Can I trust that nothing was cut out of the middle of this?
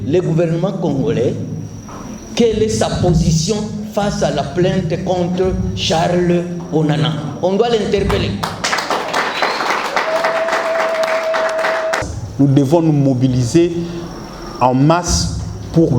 no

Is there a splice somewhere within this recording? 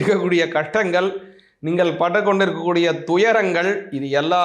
no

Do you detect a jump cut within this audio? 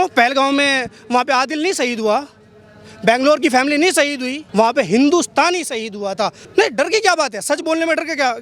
yes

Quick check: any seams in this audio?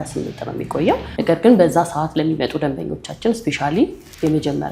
yes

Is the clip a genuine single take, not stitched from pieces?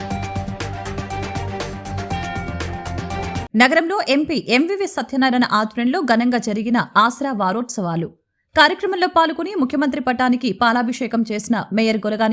yes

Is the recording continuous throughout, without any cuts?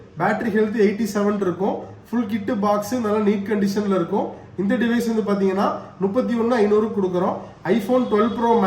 yes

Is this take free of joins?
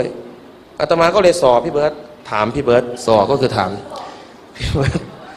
no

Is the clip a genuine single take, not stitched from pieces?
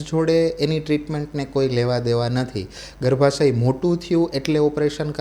yes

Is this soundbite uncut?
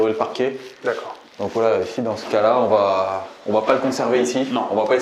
yes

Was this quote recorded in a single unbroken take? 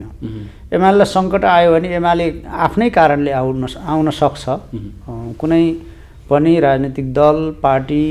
yes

